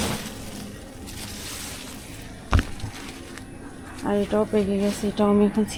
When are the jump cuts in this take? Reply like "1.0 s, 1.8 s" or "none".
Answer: none